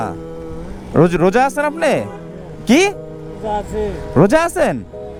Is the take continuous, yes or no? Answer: yes